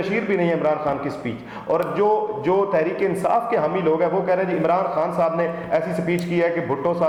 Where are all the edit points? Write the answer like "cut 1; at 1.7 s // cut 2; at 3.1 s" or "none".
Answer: none